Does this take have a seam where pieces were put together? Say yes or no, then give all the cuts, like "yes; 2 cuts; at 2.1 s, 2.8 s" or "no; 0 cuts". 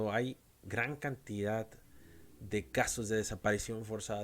no; 0 cuts